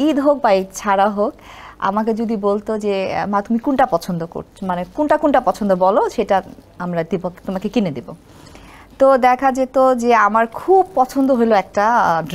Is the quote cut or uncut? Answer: uncut